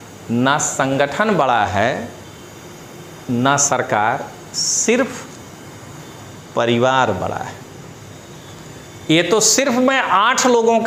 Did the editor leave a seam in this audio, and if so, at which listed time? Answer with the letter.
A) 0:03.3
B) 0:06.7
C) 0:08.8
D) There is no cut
D